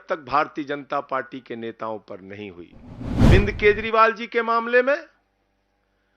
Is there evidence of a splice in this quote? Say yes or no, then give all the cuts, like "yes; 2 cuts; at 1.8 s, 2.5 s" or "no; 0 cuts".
yes; 1 cut; at 3.3 s